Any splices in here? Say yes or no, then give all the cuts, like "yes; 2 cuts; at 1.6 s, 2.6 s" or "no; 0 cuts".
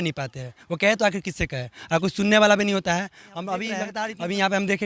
yes; 1 cut; at 3.9 s